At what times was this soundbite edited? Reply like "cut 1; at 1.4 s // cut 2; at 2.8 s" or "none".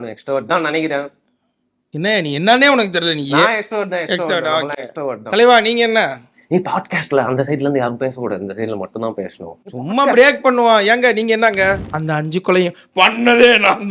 cut 1; at 11.9 s